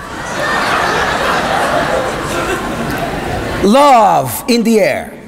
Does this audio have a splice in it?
no; 0 cuts

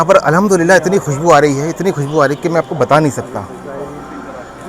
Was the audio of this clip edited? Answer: no; 0 cuts

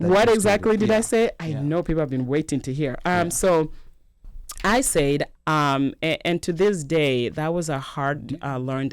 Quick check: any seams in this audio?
yes; 1 cut; at 5.3 s

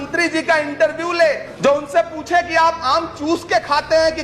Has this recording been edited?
yes; 1 cut; at 1.5 s

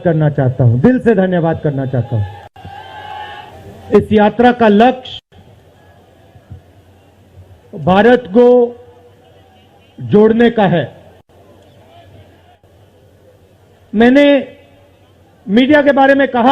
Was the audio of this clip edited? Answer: yes; 2 cuts; at 3.4 s, 12.4 s

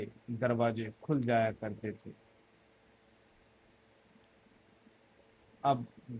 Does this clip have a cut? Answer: no; 0 cuts

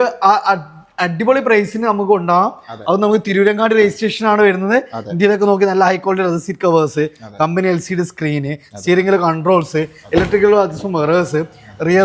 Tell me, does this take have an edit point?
no; 0 cuts

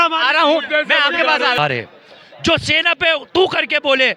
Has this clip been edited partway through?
yes; 1 cut; at 1.6 s

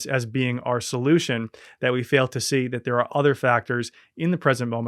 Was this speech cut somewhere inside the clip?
no; 0 cuts

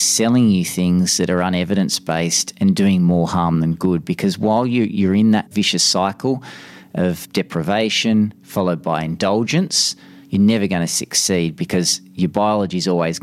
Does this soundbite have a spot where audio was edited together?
yes; 2 cuts; at 5.5 s, 7.2 s

